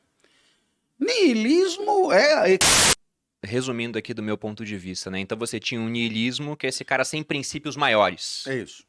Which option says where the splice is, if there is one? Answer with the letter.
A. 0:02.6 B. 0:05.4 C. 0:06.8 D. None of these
A